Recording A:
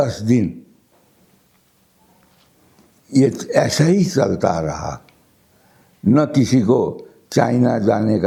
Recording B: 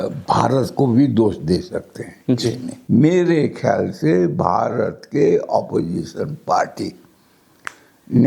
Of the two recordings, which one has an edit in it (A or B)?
B